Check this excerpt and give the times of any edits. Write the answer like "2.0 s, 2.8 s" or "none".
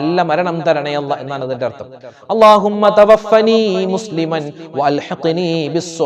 none